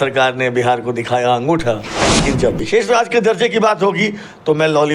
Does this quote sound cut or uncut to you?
cut